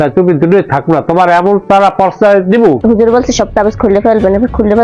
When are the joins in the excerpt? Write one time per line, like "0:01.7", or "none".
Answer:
0:02.8